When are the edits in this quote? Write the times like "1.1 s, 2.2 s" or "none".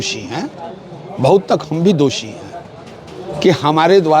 none